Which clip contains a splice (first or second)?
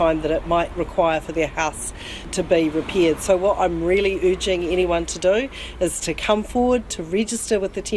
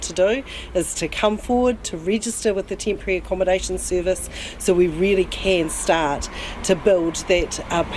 first